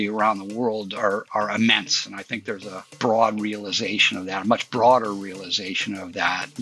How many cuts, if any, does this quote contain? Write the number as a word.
one